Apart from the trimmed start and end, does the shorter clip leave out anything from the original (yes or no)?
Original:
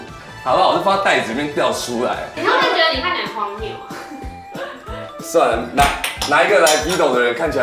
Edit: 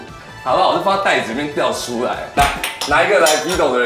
yes